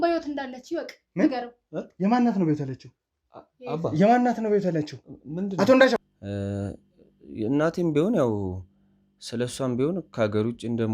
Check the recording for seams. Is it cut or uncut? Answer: cut